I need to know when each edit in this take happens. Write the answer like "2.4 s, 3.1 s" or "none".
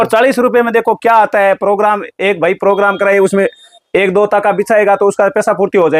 none